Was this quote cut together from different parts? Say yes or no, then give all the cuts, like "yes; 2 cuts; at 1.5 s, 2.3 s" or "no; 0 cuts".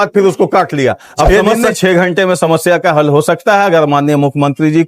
yes; 1 cut; at 1.3 s